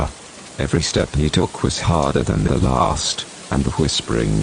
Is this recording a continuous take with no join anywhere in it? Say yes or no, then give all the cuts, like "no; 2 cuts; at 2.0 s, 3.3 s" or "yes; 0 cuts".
no; 1 cut; at 1.5 s